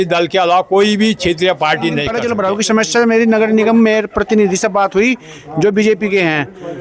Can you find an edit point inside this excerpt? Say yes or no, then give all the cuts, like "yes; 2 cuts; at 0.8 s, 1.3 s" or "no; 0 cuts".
yes; 1 cut; at 2.1 s